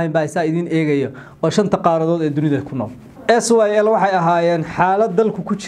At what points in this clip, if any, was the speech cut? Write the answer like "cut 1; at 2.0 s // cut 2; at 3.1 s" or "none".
cut 1; at 3.1 s